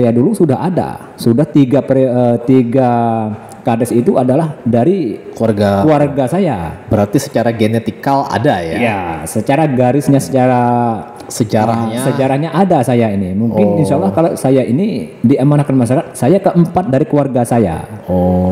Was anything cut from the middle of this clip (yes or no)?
no